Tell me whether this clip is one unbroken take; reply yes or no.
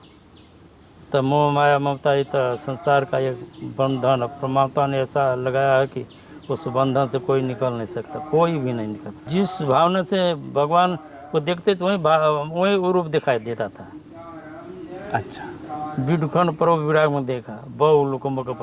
no